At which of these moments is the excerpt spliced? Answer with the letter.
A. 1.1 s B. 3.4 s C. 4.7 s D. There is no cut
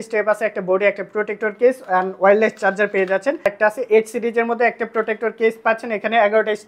B